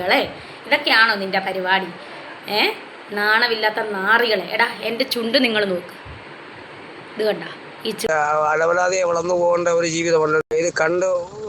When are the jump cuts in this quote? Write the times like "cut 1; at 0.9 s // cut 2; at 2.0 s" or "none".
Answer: cut 1; at 8.1 s // cut 2; at 10.4 s